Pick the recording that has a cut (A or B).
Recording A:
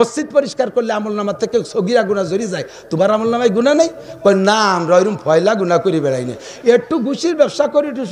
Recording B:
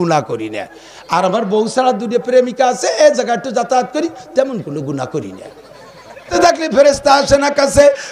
B